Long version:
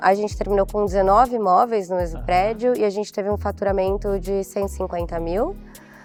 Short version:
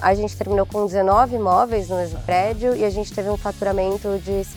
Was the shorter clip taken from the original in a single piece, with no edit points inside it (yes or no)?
yes